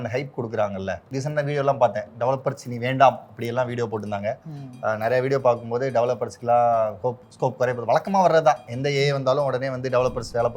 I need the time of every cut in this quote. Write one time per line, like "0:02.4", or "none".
none